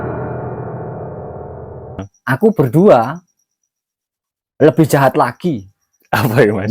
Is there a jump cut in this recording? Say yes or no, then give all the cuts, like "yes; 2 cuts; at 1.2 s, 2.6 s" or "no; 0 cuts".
yes; 1 cut; at 2.1 s